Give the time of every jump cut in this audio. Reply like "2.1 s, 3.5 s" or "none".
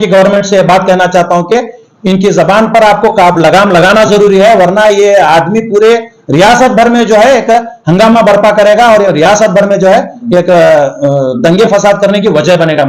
none